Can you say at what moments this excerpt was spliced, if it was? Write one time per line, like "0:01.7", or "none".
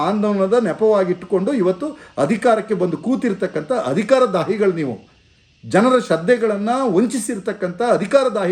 none